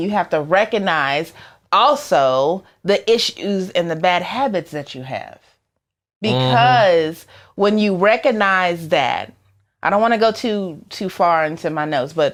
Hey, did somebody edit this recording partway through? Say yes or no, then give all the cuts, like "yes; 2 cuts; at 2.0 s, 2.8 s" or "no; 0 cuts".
no; 0 cuts